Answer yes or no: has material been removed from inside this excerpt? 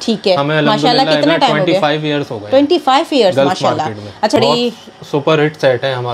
yes